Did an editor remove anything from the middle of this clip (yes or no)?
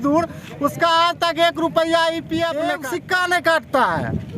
yes